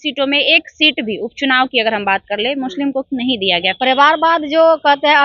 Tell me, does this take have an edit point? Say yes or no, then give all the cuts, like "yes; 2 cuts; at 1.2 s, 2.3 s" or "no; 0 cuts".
yes; 1 cut; at 3.7 s